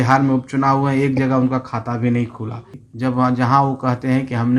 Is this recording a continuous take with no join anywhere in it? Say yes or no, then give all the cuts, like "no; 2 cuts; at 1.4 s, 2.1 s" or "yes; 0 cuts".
no; 1 cut; at 2.8 s